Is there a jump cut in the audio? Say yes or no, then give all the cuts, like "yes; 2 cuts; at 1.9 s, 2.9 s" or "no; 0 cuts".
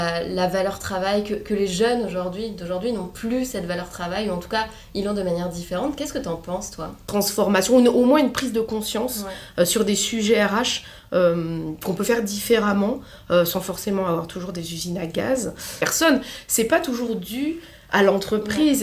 yes; 2 cuts; at 7.0 s, 15.8 s